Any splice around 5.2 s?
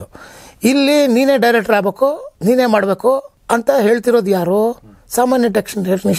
no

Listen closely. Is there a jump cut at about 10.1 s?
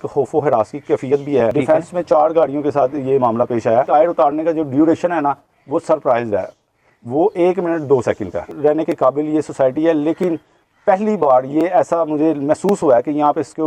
no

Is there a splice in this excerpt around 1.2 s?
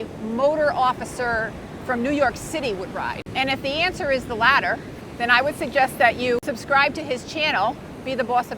no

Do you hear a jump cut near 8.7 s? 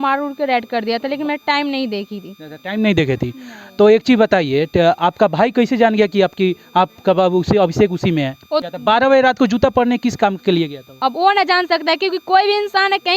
yes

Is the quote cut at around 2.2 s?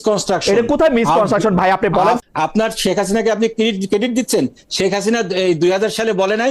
yes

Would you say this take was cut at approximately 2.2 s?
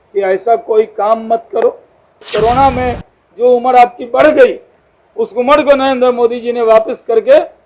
yes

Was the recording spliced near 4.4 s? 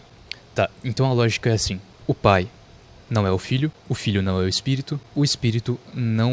no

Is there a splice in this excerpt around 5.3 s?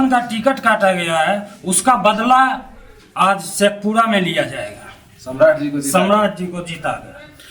no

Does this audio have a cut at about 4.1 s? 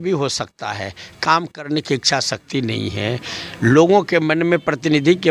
no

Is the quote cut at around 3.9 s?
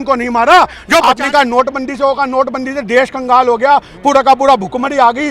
no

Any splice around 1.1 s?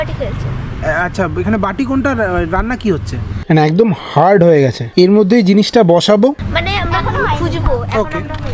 no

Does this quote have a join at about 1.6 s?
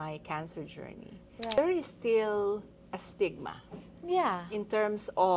yes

